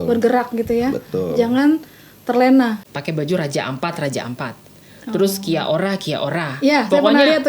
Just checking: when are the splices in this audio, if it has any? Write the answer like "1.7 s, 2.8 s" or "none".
2.9 s